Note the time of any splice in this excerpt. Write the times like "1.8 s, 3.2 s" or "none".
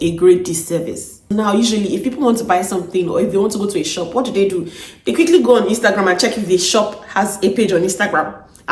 1.3 s